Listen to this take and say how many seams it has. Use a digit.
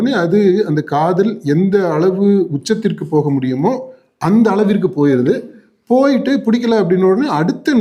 0